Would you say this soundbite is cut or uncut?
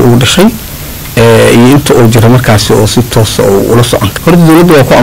cut